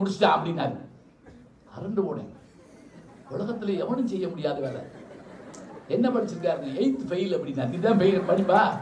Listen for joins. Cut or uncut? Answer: uncut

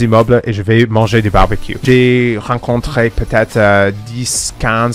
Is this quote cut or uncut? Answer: cut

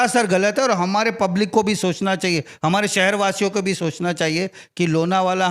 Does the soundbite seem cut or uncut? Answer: uncut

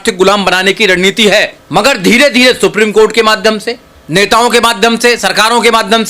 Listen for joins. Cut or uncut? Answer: cut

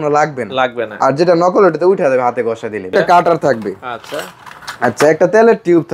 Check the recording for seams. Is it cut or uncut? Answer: cut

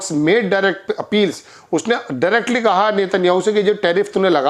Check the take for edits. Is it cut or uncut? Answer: uncut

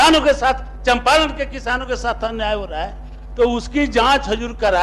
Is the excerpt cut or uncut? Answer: uncut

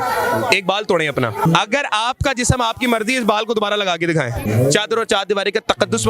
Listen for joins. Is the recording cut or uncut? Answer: cut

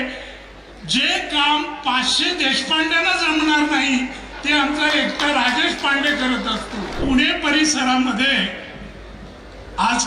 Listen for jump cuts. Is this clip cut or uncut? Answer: cut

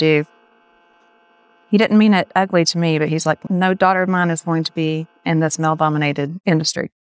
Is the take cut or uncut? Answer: uncut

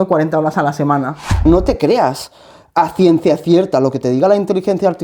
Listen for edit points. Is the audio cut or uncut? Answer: cut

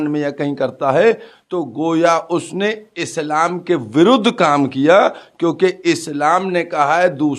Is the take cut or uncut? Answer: uncut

